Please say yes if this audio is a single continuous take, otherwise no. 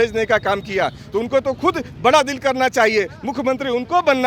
yes